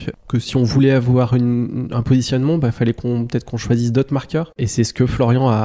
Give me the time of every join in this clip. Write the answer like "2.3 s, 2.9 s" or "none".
4.4 s